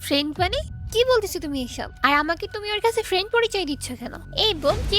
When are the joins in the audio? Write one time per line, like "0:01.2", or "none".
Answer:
0:01.9